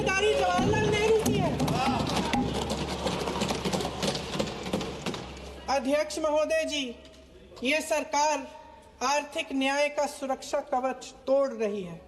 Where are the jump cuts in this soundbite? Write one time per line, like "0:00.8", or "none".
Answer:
none